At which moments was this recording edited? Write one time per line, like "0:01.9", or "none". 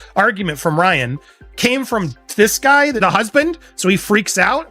0:03.0